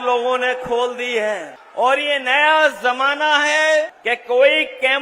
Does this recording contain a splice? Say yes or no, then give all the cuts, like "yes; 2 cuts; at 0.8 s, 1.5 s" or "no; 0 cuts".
yes; 2 cuts; at 1.6 s, 4.0 s